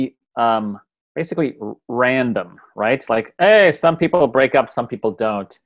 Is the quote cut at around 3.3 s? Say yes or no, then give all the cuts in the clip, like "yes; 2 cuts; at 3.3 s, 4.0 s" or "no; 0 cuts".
no; 0 cuts